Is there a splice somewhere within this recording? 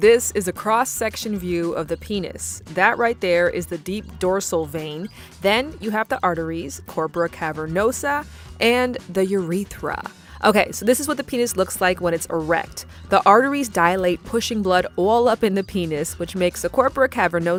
no; 0 cuts

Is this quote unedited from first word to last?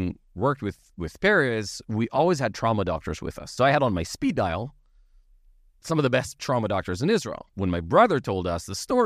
no; 2 cuts; at 3.5 s, 7.4 s

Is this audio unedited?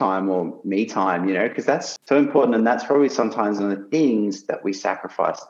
no; 1 cut; at 1.9 s

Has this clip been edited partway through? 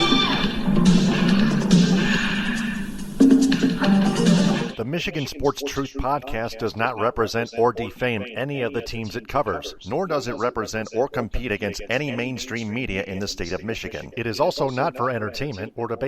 yes; 1 cut; at 4.7 s

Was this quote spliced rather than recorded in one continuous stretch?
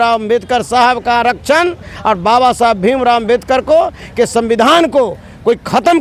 no; 0 cuts

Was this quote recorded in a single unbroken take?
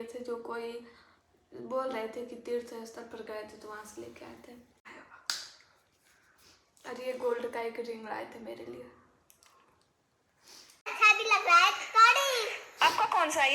no; 2 cuts; at 4.9 s, 10.9 s

